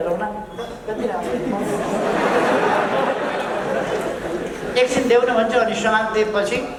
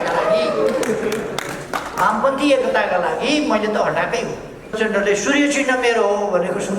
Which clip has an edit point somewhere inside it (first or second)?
second